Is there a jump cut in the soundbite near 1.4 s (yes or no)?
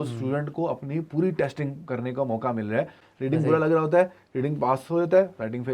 no